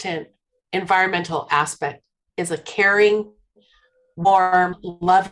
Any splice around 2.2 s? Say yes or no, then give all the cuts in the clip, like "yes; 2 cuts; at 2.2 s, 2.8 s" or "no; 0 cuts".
yes; 1 cut; at 2.2 s